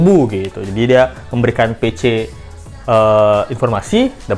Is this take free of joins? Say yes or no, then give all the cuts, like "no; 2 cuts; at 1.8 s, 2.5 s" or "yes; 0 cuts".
yes; 0 cuts